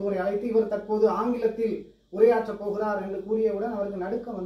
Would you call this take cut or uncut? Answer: uncut